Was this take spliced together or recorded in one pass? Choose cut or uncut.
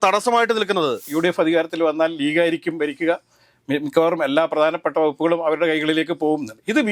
cut